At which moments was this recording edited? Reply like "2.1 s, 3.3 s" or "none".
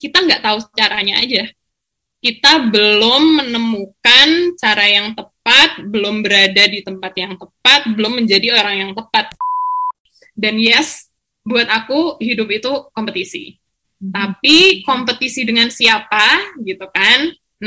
9.7 s